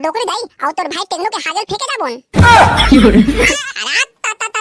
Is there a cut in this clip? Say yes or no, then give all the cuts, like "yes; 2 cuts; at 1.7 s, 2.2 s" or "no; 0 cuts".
yes; 1 cut; at 3.5 s